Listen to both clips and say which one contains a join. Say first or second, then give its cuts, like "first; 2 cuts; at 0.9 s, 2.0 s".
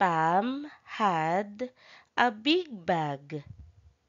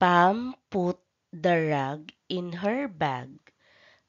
second; 1 cut; at 2.9 s